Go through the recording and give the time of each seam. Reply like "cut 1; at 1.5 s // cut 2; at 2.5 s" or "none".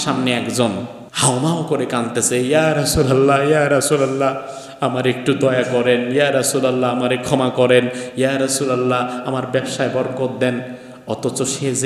cut 1; at 1.0 s